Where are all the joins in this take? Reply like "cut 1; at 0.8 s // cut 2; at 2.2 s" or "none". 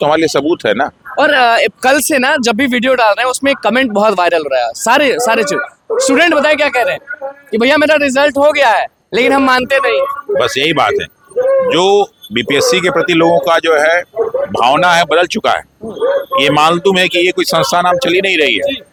none